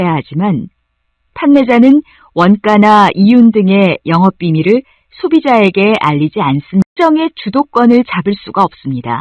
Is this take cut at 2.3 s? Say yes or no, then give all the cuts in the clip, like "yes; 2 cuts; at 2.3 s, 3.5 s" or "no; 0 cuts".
no; 1 cut; at 7.0 s